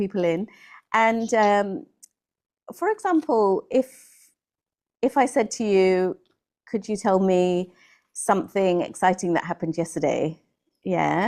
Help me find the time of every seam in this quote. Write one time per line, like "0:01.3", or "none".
none